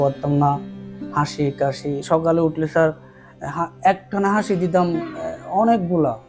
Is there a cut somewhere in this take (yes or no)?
no